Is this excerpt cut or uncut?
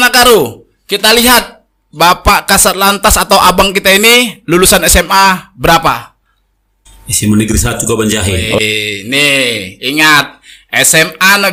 uncut